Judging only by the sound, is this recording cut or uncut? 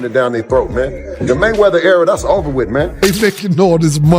cut